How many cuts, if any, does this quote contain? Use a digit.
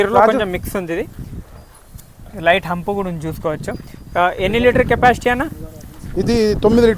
0